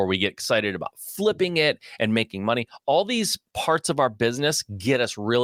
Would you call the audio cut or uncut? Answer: uncut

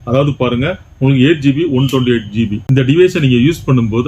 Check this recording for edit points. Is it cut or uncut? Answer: cut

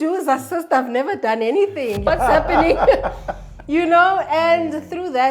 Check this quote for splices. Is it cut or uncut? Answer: cut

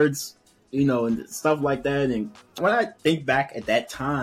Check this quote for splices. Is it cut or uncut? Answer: cut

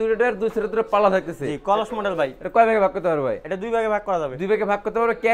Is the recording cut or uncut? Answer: uncut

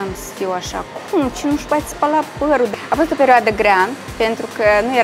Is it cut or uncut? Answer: cut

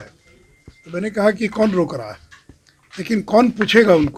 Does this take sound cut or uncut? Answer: uncut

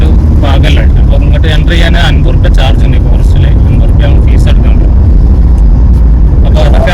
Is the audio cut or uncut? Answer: uncut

